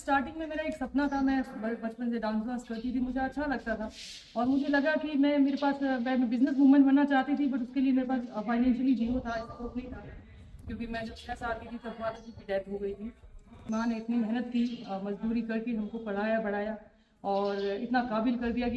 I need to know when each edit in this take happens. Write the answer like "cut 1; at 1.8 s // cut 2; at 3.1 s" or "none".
cut 1; at 13.7 s